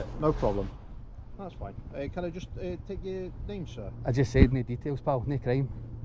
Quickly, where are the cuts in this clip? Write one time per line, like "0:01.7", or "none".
none